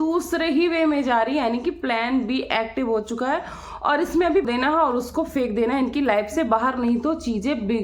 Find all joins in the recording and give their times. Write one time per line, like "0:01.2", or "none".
0:04.5